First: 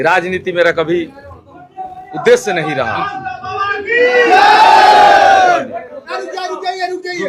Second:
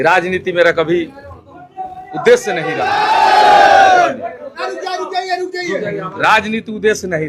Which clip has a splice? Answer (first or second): second